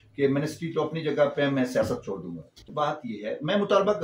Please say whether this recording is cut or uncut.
cut